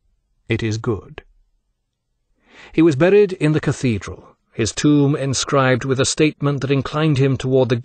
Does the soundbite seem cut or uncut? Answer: uncut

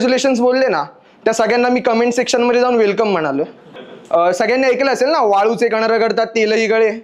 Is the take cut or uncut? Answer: cut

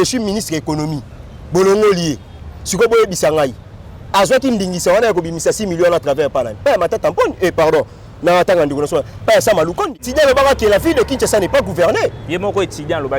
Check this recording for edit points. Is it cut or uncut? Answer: cut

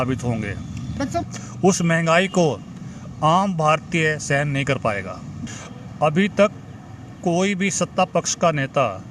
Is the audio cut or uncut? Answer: cut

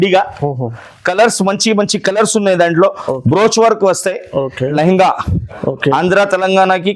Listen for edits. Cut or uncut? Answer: cut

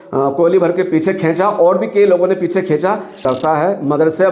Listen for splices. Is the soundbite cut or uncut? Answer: cut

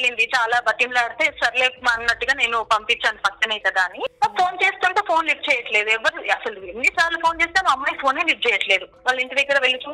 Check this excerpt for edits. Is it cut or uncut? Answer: cut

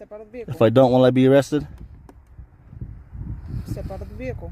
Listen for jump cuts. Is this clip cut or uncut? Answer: uncut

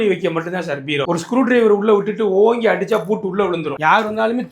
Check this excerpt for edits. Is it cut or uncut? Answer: cut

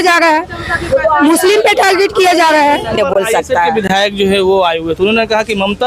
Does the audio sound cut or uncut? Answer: cut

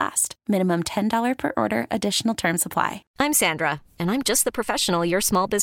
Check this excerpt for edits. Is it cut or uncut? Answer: cut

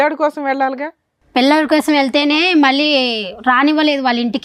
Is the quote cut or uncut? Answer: uncut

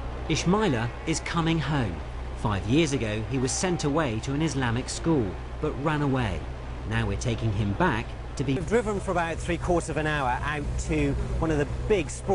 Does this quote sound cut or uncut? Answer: cut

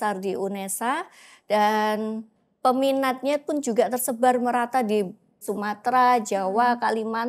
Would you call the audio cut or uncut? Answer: cut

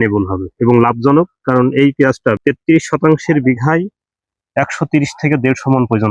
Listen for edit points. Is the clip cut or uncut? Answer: cut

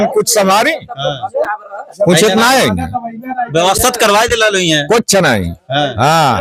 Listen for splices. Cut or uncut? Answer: uncut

